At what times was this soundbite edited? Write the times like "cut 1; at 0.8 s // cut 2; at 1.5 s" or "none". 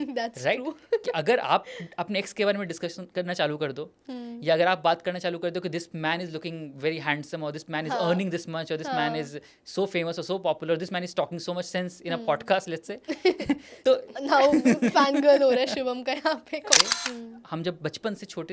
cut 1; at 16.8 s